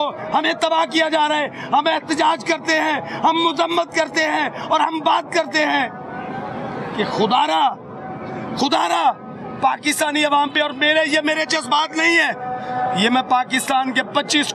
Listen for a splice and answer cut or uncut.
uncut